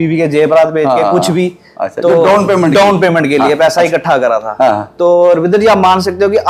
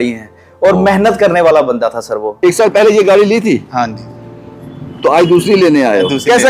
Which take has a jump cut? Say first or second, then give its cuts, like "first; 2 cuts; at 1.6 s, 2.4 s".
second; 1 cut; at 2.3 s